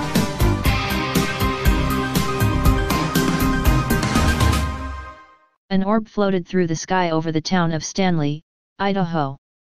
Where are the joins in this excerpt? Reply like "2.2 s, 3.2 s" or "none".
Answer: 3.0 s